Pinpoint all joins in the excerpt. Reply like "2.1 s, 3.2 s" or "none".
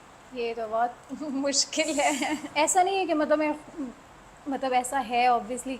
2.5 s